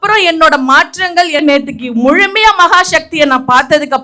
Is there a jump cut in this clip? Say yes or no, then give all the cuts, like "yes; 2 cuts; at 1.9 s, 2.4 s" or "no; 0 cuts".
yes; 1 cut; at 1.4 s